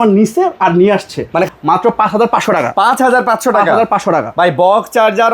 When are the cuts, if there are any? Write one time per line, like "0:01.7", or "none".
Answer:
0:01.5